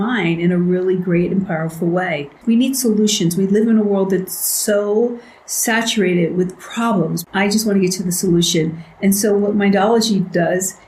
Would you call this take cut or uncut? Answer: cut